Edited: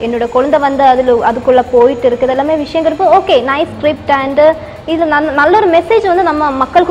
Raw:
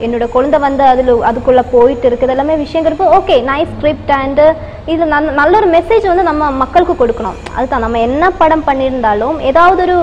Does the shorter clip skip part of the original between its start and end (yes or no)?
no